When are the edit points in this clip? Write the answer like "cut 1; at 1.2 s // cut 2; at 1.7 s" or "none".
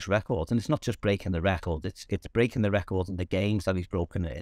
none